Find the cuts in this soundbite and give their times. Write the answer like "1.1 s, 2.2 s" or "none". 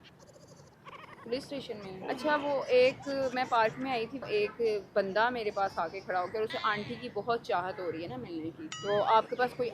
1.9 s, 8.7 s